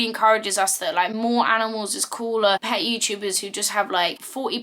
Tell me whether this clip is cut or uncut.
cut